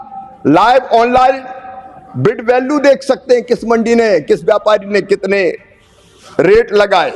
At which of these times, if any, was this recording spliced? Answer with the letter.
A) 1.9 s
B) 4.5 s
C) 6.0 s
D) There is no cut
D